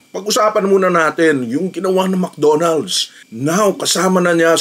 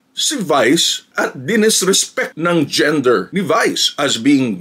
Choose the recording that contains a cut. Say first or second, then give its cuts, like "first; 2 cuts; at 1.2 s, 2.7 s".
first; 1 cut; at 3.3 s